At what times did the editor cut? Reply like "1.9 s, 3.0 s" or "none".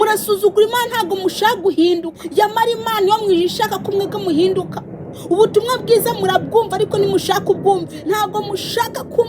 2.2 s, 7.9 s